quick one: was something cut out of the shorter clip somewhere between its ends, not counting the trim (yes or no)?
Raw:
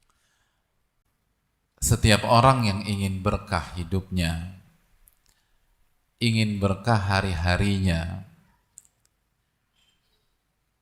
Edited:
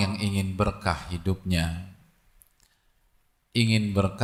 no